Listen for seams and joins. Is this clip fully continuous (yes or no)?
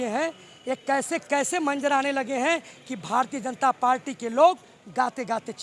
yes